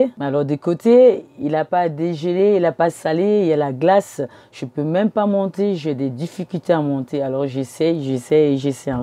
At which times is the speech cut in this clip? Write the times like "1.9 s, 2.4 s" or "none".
none